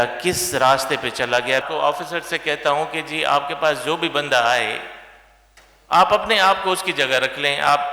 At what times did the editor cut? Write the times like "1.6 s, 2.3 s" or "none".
1.6 s